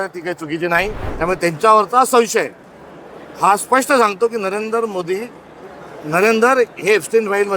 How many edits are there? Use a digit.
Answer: 1